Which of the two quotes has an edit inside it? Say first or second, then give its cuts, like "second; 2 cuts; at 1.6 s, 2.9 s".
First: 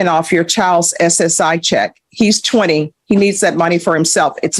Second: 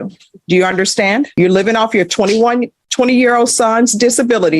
second; 1 cut; at 1.3 s